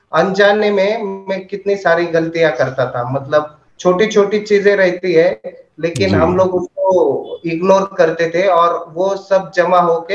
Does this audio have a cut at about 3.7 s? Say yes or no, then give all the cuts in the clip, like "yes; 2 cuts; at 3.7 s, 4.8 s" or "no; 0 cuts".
no; 0 cuts